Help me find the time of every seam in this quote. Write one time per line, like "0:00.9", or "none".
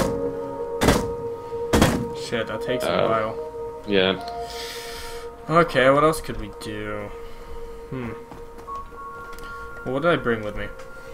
0:08.3